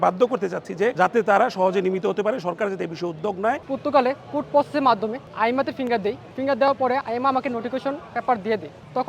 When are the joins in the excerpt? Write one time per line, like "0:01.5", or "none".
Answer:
0:00.9
0:03.7